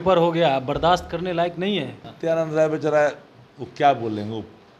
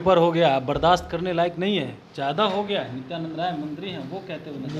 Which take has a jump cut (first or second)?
first